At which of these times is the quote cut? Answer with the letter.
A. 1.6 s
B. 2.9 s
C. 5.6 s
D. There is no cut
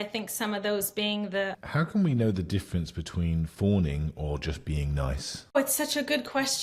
A